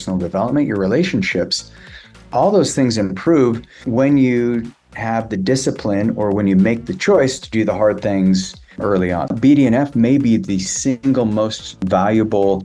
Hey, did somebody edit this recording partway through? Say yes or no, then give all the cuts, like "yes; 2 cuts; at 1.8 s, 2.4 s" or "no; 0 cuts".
yes; 1 cut; at 9.3 s